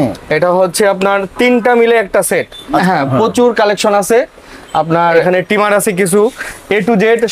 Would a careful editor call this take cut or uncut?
cut